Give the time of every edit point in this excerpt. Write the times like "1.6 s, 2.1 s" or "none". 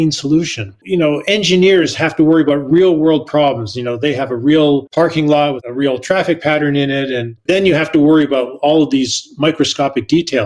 none

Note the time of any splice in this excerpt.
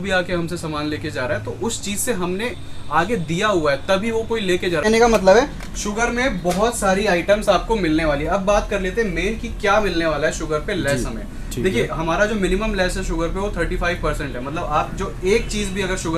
4.9 s

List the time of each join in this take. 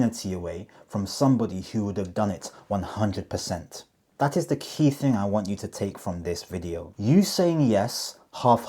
6.9 s

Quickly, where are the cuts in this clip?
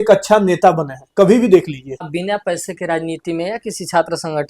2.2 s

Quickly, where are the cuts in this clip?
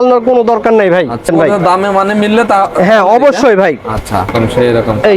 1.3 s, 4.3 s

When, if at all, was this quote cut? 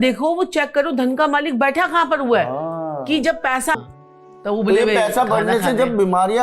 3.8 s

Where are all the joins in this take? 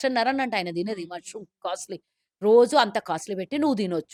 none

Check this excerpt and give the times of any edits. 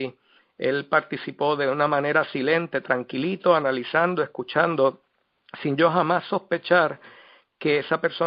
3.2 s

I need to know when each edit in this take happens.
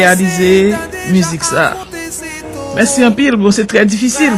3.2 s

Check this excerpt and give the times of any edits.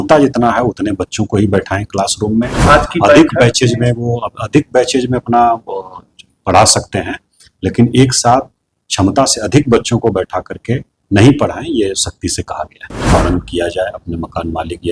2.6 s, 13.1 s

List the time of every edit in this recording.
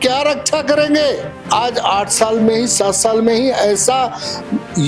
1.3 s

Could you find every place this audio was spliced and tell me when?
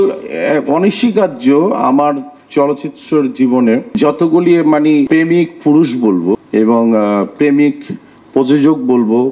3.9 s, 5.1 s, 6.4 s

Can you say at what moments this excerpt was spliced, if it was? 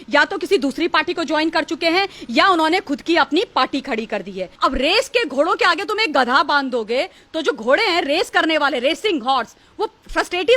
4.5 s

